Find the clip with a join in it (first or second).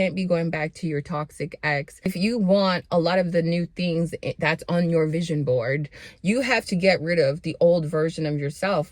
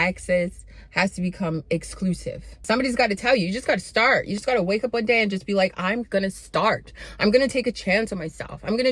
second